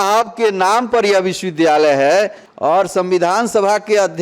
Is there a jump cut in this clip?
yes; 1 cut; at 2.4 s

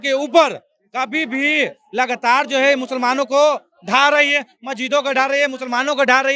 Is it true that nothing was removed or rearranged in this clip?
yes; 0 cuts

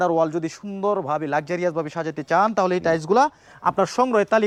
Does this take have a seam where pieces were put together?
no; 0 cuts

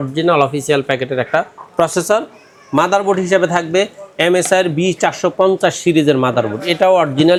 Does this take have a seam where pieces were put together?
no; 0 cuts

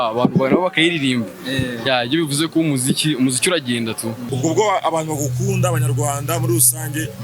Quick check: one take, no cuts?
no; 1 cut; at 4.2 s

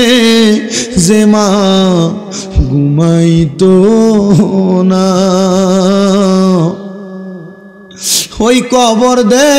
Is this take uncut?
yes; 0 cuts

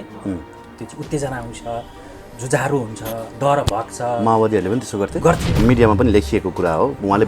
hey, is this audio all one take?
no; 1 cut; at 5.6 s

